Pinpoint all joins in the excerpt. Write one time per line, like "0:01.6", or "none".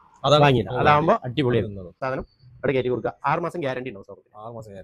0:01.9